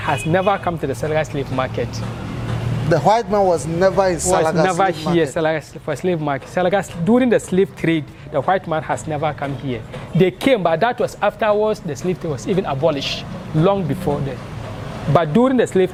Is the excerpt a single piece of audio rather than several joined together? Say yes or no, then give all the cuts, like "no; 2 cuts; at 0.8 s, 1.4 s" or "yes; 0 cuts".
yes; 0 cuts